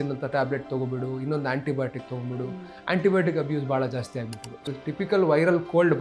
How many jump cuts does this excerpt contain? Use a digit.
1